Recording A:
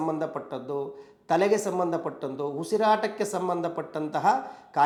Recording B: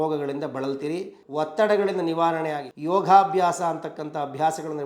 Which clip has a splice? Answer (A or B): B